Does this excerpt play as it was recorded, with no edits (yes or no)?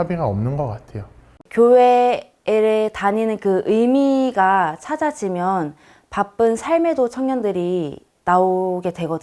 no